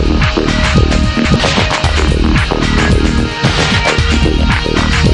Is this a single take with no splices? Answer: no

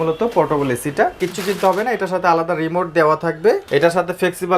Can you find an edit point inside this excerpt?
yes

